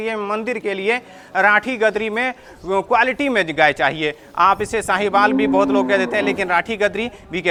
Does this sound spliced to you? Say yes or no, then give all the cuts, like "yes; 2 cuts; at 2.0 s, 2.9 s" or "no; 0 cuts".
no; 0 cuts